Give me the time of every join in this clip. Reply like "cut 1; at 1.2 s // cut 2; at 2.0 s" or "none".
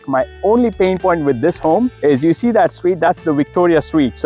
none